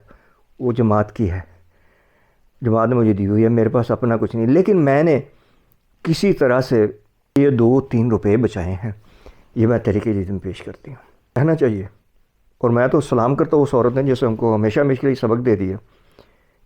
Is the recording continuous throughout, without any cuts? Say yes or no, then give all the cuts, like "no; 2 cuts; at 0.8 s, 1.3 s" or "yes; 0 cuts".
no; 2 cuts; at 7.4 s, 11.4 s